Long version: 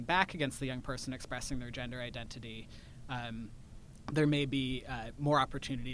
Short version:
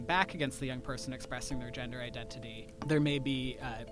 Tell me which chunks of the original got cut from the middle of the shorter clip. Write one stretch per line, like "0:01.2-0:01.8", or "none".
0:02.6-0:03.9